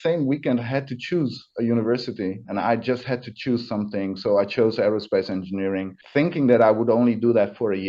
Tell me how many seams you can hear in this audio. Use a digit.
2